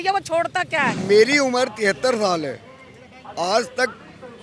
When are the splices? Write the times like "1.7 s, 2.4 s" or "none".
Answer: 0.9 s